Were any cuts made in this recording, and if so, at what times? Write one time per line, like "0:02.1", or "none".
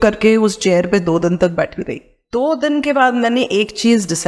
0:02.2